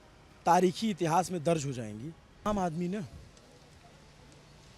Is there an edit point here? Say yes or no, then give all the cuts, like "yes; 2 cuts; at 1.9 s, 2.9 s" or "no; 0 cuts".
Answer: yes; 1 cut; at 2.5 s